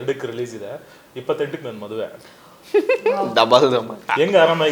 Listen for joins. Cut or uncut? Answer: uncut